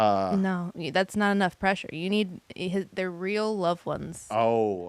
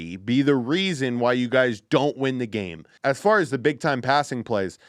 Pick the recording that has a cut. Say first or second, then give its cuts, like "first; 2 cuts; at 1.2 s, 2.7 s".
second; 1 cut; at 2.9 s